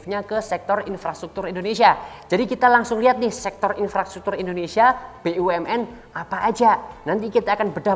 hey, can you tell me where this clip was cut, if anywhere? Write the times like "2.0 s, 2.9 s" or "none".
none